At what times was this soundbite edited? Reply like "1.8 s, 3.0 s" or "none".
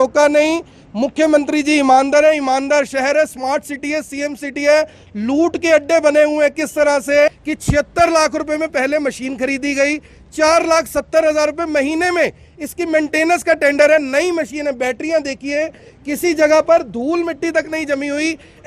7.3 s

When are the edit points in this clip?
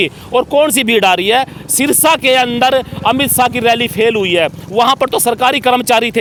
none

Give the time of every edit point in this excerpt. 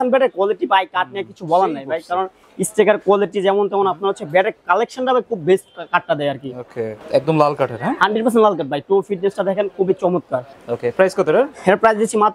6.9 s, 10.5 s

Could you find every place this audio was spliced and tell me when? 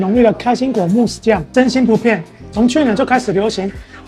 1.5 s

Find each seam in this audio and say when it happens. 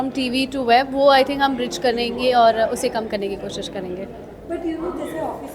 none

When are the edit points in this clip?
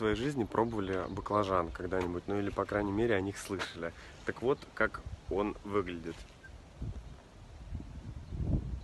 none

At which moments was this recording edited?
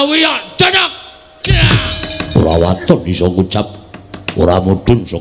2.1 s

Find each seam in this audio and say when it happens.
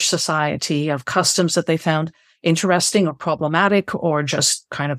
none

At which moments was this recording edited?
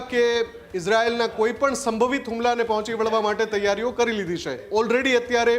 4.6 s

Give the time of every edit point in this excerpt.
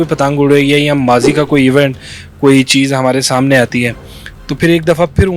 none

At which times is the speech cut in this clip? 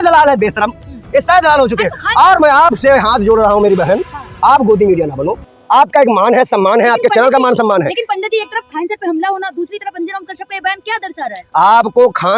none

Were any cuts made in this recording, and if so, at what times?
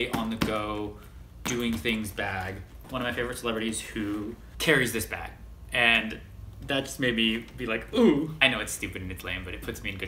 2.8 s, 4.5 s, 8.4 s

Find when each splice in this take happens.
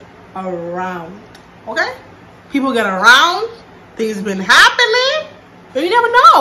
none

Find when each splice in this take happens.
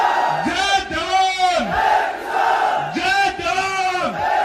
none

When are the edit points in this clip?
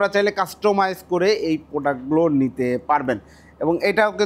none

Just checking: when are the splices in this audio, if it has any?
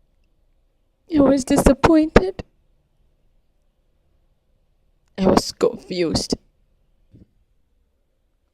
7.1 s

